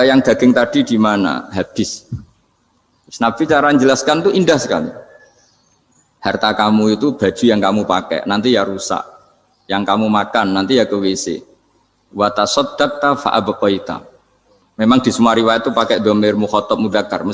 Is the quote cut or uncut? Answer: uncut